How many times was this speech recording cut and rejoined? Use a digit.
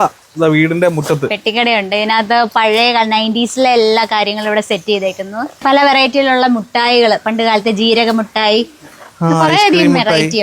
0